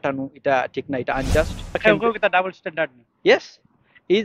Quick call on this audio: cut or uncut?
cut